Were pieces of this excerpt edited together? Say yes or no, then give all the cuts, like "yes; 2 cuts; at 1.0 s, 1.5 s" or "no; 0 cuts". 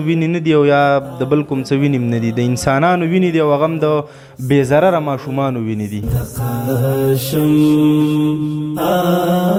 no; 0 cuts